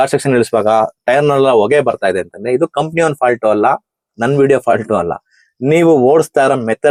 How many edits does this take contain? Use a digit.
0